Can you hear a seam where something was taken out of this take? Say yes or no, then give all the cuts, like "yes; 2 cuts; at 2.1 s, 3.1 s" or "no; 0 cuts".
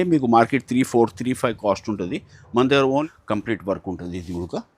yes; 1 cut; at 3.1 s